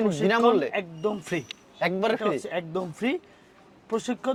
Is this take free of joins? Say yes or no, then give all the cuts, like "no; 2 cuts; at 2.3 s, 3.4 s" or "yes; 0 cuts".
yes; 0 cuts